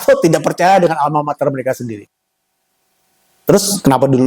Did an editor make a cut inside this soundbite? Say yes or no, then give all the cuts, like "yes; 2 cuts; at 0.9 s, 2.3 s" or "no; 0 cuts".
no; 0 cuts